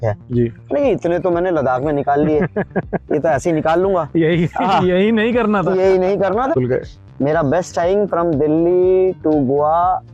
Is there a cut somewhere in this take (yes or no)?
yes